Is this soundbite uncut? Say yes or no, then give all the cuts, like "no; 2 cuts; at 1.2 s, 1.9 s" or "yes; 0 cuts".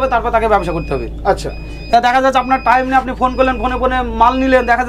yes; 0 cuts